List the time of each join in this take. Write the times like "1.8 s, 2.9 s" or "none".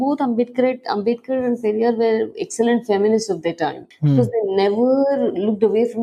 none